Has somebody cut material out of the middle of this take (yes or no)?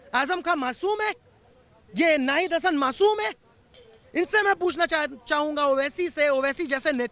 no